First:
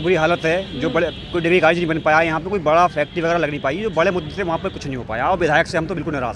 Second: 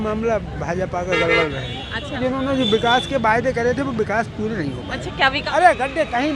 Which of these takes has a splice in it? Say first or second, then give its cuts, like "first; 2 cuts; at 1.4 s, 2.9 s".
second; 2 cuts; at 2.1 s, 5.4 s